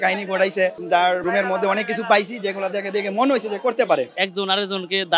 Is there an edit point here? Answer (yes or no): yes